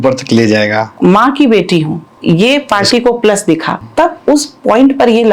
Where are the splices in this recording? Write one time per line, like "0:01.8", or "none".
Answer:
0:00.9
0:02.0
0:03.8